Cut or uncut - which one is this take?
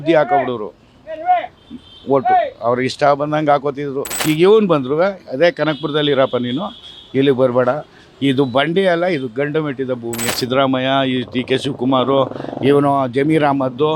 cut